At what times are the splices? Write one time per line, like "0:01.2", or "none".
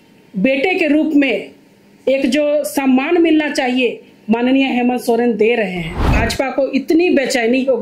0:06.1